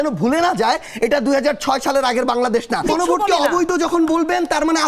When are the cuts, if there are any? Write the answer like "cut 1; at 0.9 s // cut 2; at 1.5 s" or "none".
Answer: cut 1; at 2.9 s